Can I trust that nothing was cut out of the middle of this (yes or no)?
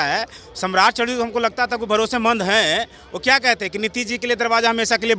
yes